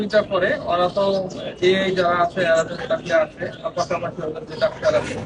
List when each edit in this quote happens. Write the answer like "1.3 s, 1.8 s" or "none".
none